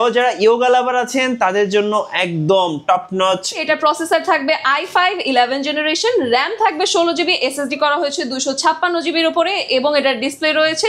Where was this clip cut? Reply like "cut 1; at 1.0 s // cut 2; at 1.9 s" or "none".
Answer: cut 1; at 3.6 s